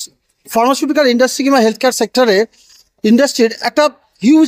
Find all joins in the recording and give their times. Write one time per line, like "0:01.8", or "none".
none